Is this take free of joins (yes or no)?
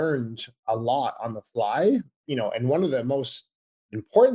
no